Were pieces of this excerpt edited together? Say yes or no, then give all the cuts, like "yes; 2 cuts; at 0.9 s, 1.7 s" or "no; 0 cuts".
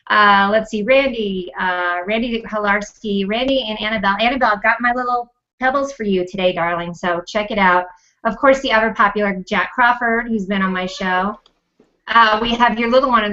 no; 0 cuts